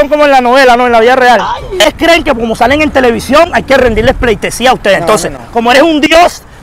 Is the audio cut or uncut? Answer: cut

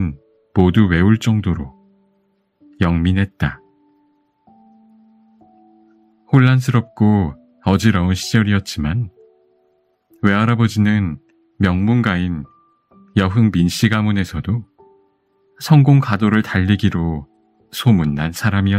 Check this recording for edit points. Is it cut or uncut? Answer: uncut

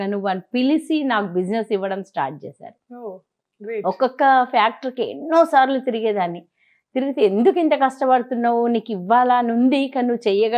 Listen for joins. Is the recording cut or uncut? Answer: uncut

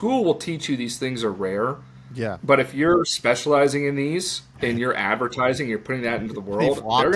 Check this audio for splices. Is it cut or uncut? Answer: uncut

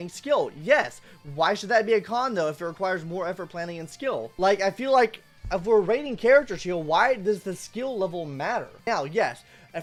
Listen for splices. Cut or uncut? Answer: uncut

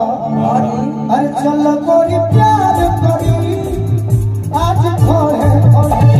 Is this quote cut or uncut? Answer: uncut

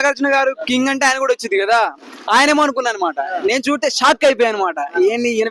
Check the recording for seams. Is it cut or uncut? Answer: uncut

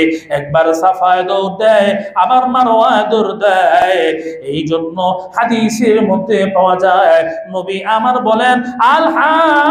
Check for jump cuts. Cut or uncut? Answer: cut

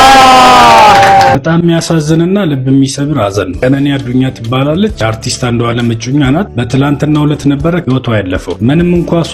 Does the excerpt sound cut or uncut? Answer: cut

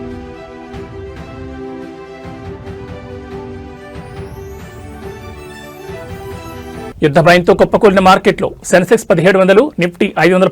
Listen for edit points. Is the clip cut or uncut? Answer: cut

